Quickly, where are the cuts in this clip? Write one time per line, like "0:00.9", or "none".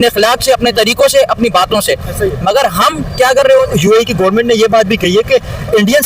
0:03.7

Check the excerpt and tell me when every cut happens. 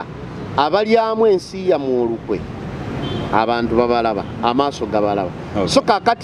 none

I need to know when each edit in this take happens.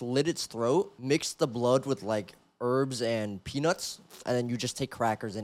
0:01.0

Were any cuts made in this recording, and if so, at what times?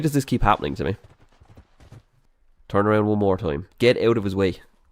0:02.1

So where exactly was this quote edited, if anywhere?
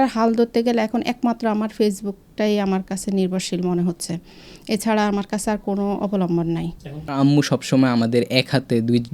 0:07.1

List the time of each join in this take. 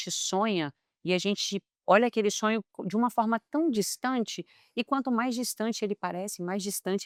none

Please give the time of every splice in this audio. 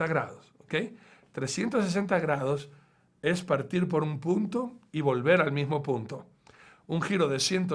0:06.5

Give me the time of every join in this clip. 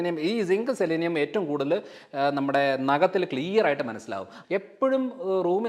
0:04.3

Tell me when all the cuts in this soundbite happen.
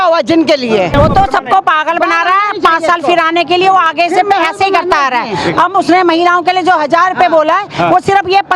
0:00.9

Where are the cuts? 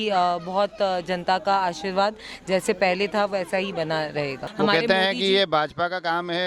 0:04.4

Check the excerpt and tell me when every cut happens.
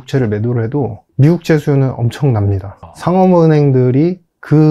0:01.0
0:02.9

